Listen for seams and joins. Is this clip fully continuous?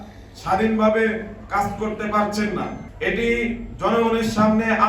no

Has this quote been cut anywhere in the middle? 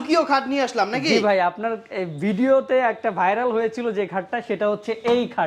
no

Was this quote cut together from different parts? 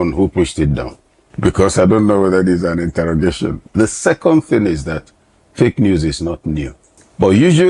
no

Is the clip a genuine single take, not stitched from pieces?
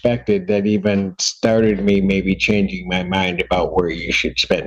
yes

